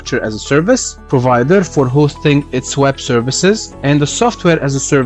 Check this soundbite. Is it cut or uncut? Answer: cut